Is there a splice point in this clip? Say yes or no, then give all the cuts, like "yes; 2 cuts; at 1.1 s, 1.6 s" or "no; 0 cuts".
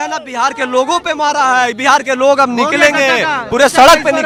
no; 0 cuts